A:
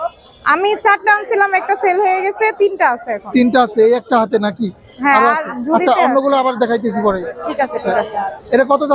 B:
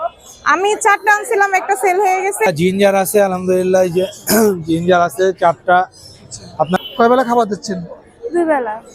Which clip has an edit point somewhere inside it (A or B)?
B